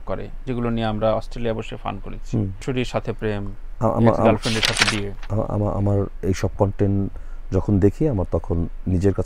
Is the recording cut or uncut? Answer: cut